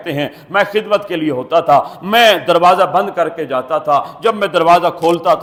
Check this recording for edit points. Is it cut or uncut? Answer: uncut